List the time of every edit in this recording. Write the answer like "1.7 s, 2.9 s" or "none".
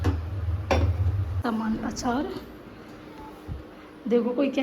1.2 s